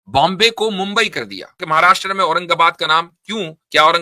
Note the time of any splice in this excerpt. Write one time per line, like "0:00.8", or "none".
0:01.6